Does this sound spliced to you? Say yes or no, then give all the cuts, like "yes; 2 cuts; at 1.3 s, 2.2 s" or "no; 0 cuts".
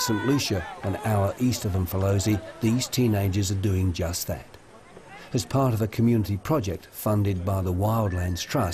no; 0 cuts